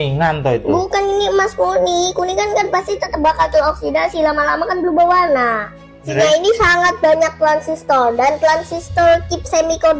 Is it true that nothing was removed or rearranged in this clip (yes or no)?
no